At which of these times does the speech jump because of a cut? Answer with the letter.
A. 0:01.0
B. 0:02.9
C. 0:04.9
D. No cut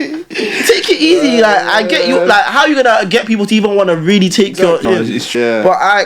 C